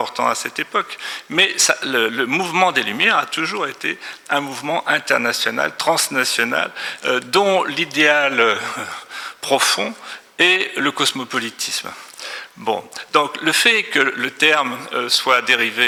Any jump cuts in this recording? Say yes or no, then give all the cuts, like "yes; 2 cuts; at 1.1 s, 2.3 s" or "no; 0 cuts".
no; 0 cuts